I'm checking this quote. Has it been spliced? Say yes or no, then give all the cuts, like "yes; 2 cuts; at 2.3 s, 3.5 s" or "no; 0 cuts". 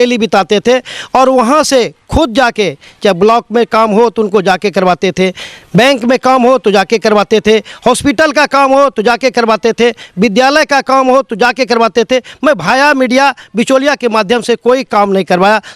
no; 0 cuts